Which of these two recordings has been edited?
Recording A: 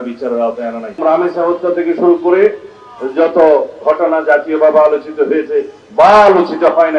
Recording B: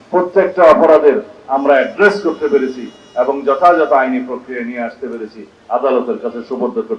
A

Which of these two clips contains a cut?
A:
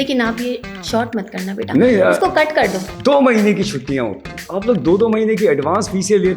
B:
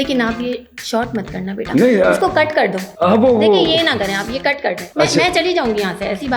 A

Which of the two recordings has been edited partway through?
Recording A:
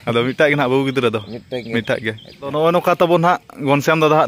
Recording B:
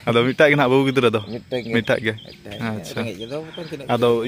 A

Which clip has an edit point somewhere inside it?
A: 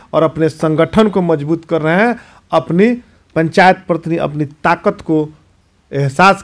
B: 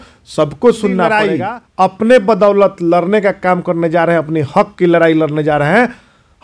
B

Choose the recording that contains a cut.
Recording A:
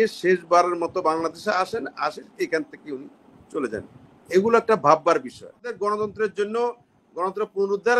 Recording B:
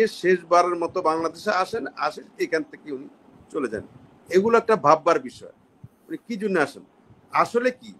A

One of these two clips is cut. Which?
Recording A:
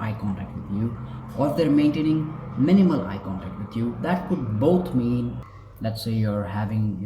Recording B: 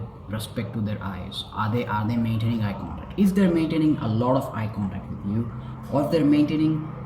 A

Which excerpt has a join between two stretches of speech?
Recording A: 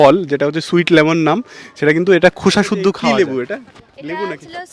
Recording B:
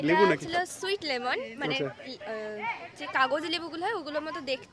A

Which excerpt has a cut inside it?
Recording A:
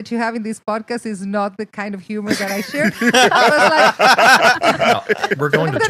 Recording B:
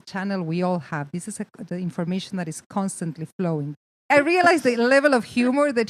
B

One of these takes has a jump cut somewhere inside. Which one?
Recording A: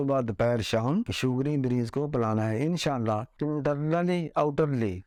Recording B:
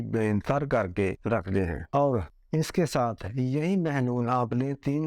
B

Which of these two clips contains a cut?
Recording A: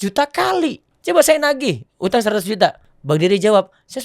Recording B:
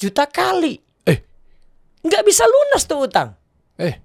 A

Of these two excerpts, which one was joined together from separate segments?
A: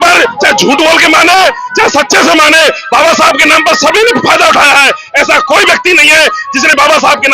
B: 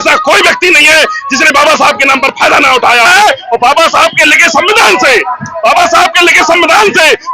B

